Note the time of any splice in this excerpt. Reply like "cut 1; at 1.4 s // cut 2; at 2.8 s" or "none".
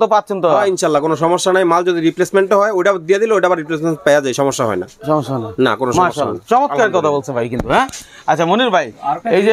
none